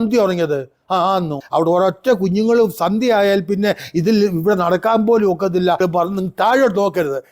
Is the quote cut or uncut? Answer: cut